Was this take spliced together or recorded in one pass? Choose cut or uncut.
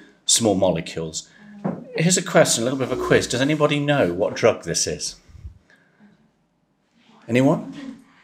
uncut